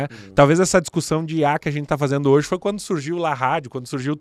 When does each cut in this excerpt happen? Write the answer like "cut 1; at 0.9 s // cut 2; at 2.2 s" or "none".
none

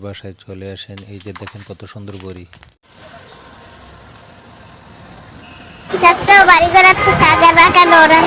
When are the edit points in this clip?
cut 1; at 2.8 s

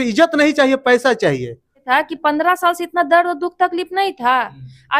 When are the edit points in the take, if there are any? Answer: cut 1; at 1.8 s

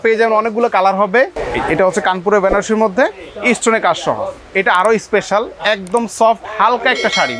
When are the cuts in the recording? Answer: cut 1; at 1.4 s

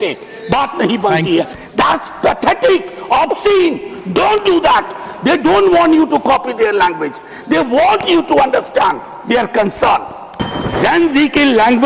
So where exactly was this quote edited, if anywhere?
cut 1; at 1.6 s // cut 2; at 10.4 s

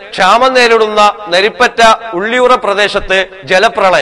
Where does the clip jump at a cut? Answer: none

